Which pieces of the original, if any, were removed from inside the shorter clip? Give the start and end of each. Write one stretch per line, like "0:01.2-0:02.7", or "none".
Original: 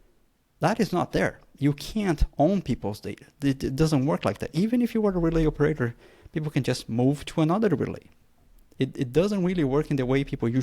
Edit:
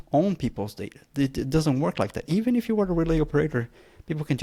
none